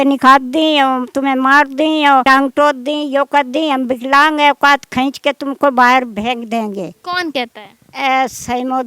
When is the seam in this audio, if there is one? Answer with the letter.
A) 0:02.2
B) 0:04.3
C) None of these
A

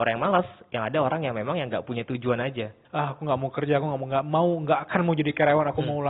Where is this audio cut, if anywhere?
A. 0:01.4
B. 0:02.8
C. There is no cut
B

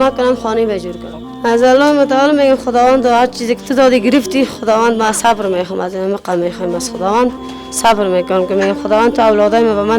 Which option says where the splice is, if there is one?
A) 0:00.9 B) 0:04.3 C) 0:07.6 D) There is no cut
A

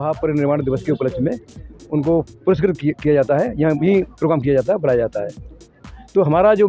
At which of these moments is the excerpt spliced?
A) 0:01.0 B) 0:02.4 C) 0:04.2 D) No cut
D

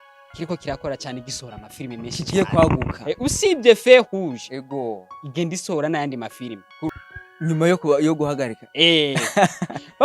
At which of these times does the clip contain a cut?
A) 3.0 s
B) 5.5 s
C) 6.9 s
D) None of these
C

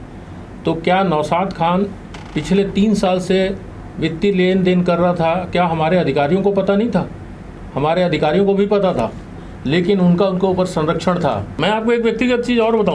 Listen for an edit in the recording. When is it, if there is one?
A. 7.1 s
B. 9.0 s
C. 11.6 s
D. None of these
C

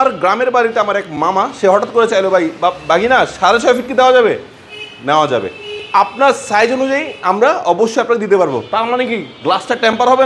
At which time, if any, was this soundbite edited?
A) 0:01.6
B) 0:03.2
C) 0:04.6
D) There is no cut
D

